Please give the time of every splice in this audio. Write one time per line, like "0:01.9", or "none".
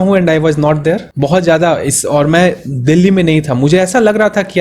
0:01.1

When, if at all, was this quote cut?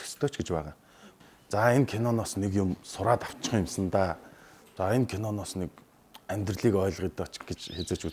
0:01.2

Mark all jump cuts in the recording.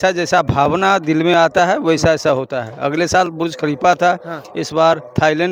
none

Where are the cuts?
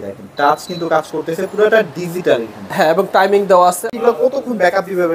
0:03.9

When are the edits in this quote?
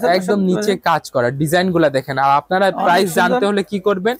none

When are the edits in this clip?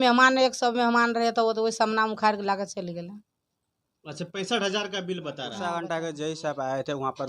0:05.5

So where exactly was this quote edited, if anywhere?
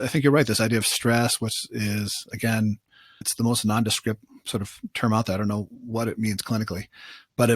0:03.2

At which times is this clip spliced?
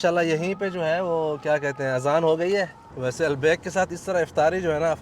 0:02.8

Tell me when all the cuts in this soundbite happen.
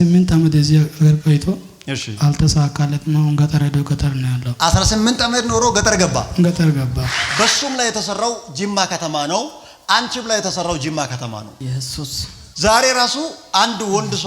0:07.2

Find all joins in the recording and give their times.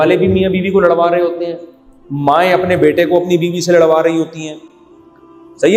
none

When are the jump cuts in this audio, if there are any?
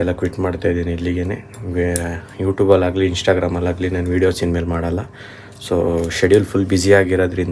none

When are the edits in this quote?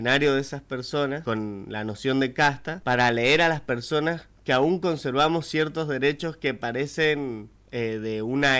0:01.2
0:02.7

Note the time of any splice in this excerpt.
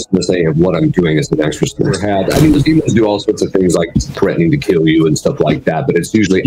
0:02.0

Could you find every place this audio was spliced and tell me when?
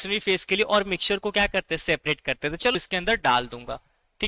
0:02.7

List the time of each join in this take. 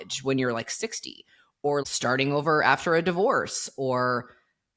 0:01.8

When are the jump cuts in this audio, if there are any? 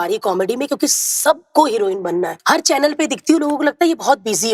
0:02.3

